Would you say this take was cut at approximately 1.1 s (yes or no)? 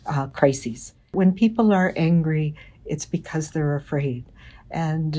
yes